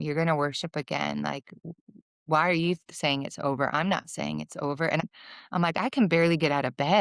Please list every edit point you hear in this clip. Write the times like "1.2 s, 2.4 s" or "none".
5.0 s